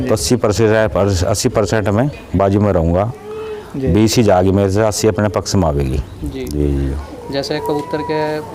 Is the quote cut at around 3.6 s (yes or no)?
no